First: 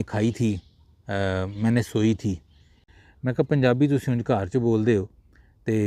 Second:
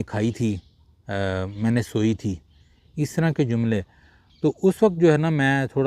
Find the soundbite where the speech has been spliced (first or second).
first